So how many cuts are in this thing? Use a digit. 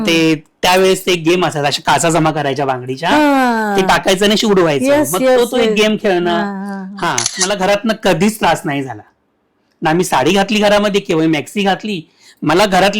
1